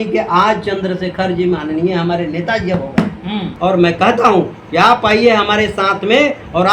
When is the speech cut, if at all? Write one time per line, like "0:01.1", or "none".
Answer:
0:03.5